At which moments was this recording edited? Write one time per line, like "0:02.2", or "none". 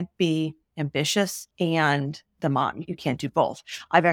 0:01.4
0:02.9